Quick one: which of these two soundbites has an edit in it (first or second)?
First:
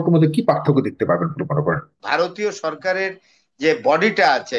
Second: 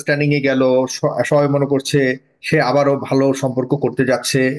first